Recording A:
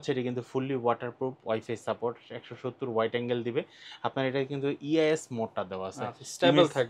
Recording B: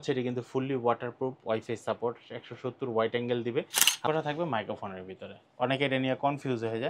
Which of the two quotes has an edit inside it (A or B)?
B